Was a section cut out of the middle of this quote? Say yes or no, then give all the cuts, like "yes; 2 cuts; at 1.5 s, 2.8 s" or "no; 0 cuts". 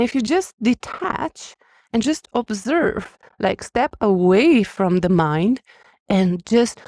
no; 0 cuts